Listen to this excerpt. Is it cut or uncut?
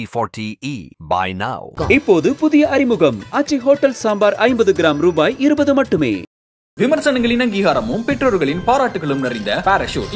uncut